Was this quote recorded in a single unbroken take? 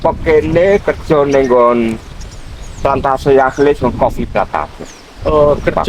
yes; 0 cuts

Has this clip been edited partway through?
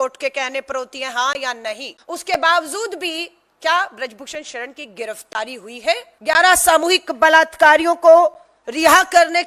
yes; 2 cuts; at 1.9 s, 6.1 s

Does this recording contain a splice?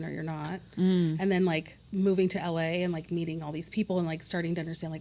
yes; 1 cut; at 1.8 s

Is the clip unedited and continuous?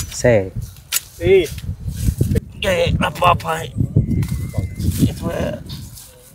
no; 1 cut; at 2.5 s

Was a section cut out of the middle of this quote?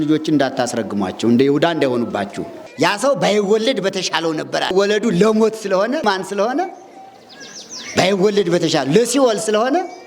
yes; 3 cuts; at 2.6 s, 4.7 s, 6.0 s

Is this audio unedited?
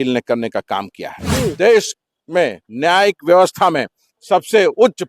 no; 1 cut; at 1.5 s

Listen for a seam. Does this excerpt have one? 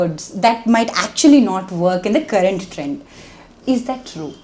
no; 0 cuts

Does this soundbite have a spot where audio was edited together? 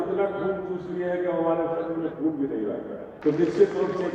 yes; 1 cut; at 3.1 s

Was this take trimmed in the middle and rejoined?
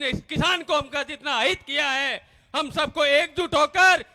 no; 0 cuts

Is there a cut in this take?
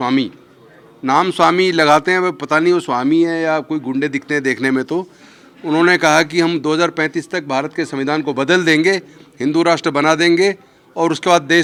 no; 0 cuts

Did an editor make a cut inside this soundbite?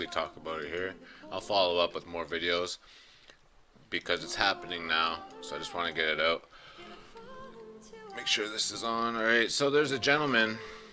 no; 0 cuts

